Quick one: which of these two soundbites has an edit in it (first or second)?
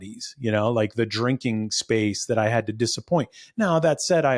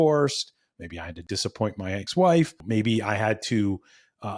second